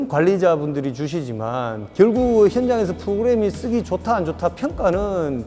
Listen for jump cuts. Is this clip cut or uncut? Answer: uncut